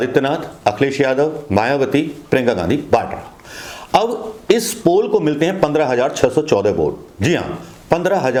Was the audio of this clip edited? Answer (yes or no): no